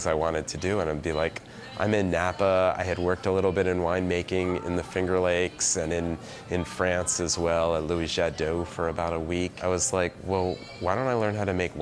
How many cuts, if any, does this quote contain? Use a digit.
1